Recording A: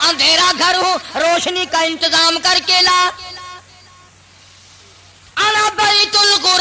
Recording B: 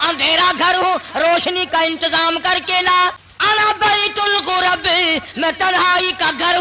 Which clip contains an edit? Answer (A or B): B